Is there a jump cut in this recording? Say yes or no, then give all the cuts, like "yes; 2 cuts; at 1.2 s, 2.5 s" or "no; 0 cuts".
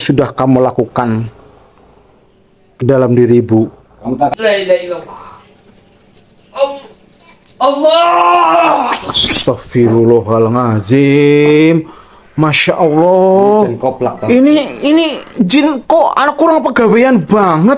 yes; 1 cut; at 4.3 s